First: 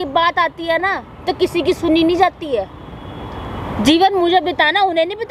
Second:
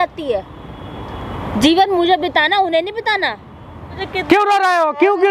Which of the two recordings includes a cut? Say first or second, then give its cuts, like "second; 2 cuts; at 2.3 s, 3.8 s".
second; 1 cut; at 4.0 s